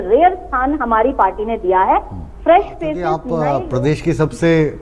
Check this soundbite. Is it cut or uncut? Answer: cut